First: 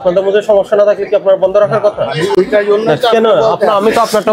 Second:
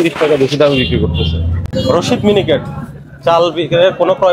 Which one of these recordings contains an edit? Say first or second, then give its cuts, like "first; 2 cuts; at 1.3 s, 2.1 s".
second; 1 cut; at 1.7 s